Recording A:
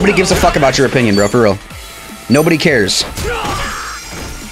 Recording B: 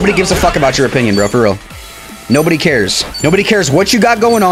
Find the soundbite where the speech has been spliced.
B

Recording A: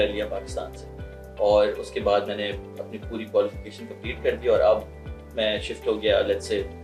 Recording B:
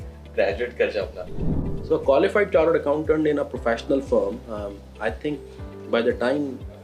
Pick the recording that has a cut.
B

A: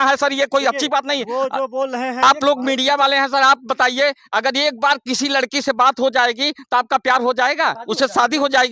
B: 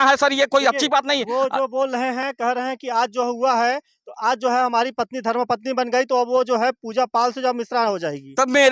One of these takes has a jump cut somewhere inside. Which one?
A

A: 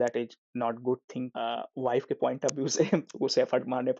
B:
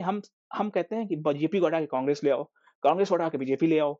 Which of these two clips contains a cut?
A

